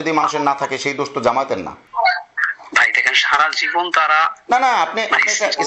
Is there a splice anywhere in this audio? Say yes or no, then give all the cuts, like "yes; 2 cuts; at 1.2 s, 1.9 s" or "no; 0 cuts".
no; 0 cuts